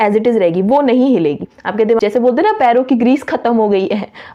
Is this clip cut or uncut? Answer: cut